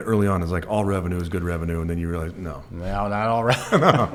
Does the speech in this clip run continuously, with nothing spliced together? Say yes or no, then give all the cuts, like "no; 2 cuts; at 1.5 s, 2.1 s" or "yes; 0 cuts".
yes; 0 cuts